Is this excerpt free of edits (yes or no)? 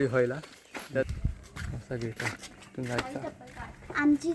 no